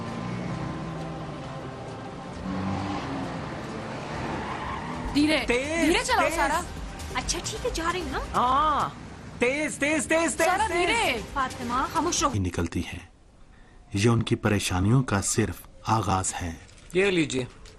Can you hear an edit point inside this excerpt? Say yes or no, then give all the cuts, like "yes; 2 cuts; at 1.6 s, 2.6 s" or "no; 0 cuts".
no; 0 cuts